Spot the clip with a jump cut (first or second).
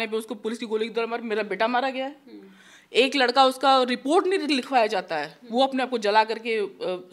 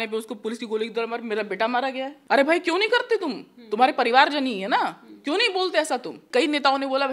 second